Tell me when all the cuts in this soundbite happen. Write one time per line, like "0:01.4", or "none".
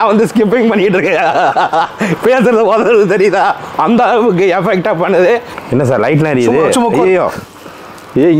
0:05.5

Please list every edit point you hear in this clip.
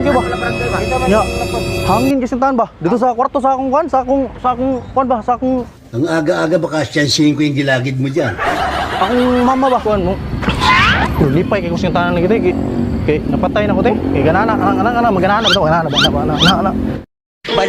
0:09.8

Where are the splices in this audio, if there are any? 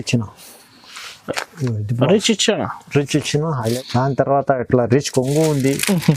0:03.8

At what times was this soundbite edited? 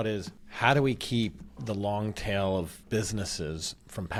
none

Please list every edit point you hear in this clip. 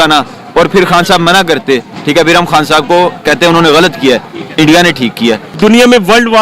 0:05.5

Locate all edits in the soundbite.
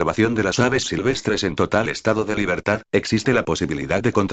none

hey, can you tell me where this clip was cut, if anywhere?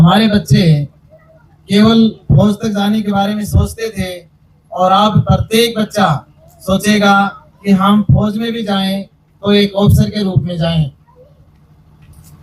none

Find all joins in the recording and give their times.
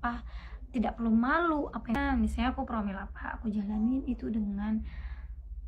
0:01.9

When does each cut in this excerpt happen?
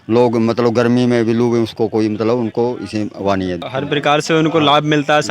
0:03.7

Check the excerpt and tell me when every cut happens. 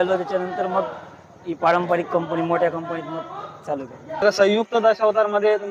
0:04.2

